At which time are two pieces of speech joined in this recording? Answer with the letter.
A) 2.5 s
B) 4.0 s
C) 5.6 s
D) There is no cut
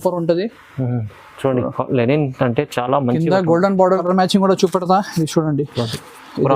B